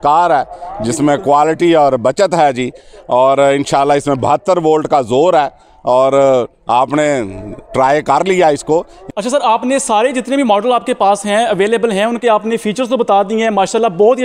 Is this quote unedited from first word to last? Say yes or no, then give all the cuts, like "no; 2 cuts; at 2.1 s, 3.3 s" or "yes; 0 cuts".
no; 1 cut; at 9.0 s